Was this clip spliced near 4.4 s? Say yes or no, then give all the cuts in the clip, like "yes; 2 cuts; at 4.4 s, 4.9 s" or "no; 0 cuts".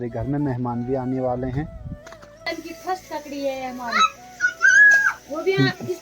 no; 1 cut; at 2.5 s